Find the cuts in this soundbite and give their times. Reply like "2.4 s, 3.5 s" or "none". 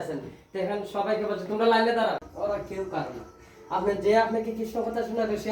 2.3 s